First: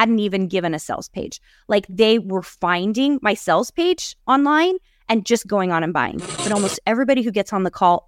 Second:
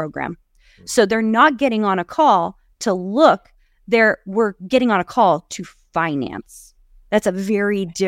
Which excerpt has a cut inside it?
first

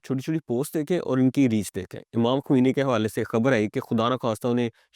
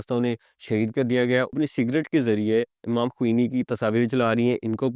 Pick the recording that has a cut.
second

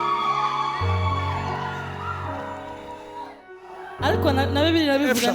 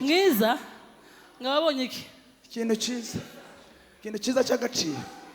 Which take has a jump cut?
first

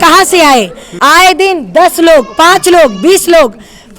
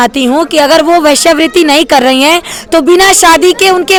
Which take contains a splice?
first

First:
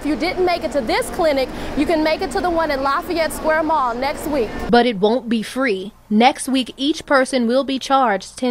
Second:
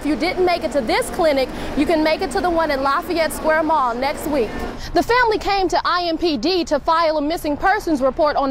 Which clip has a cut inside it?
second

